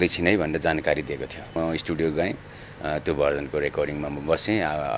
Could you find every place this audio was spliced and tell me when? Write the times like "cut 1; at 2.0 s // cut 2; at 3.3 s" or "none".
cut 1; at 1.6 s